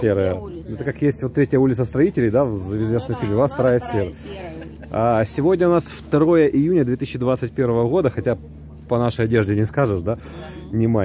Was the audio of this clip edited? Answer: no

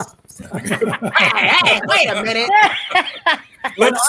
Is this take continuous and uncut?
yes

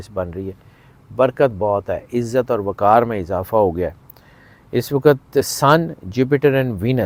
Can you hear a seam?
no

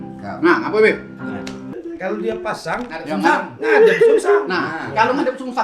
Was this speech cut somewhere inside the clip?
yes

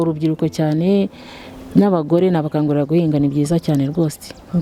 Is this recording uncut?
yes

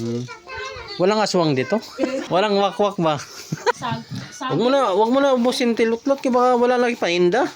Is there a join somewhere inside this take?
yes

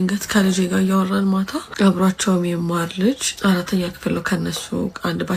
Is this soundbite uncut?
no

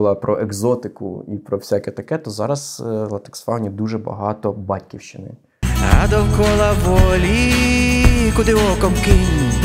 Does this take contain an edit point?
yes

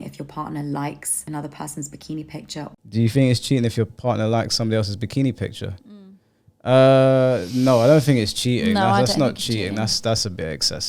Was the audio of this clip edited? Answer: no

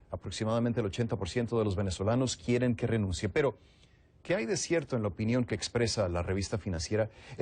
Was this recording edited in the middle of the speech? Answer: yes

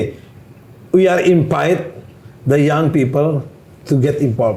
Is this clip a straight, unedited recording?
yes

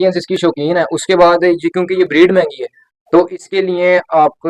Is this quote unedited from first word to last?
yes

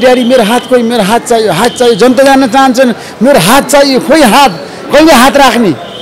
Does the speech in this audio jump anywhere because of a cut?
no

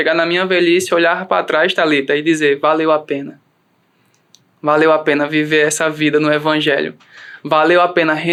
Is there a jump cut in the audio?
no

